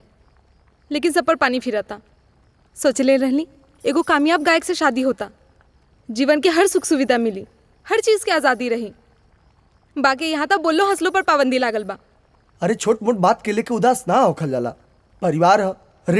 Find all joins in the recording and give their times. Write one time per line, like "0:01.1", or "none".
none